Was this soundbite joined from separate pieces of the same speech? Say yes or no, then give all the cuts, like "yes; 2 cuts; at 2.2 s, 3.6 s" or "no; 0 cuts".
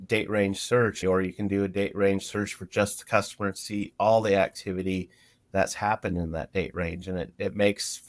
yes; 1 cut; at 1.0 s